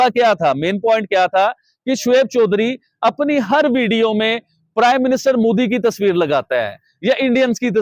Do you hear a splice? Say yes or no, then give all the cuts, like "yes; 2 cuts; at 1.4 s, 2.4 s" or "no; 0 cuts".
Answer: no; 0 cuts